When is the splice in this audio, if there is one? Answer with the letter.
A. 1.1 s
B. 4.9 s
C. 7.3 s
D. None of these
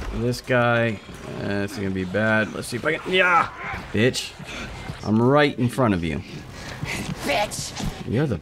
B